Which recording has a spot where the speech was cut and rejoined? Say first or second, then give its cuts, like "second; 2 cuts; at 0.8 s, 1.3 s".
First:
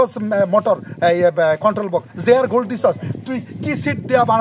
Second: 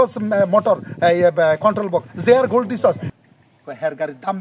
second; 1 cut; at 3.1 s